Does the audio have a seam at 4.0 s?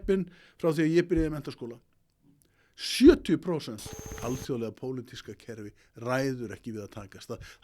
yes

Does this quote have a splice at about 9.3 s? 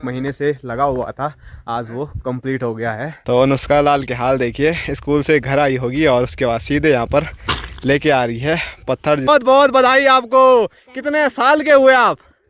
yes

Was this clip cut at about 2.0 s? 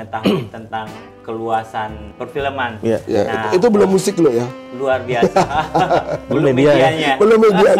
yes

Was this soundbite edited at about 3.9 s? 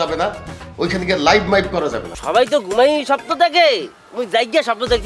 no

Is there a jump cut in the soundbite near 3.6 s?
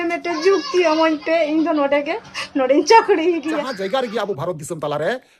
yes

